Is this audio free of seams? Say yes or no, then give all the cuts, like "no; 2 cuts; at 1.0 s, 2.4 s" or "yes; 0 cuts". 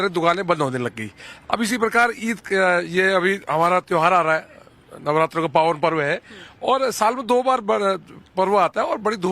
no; 1 cut; at 4.2 s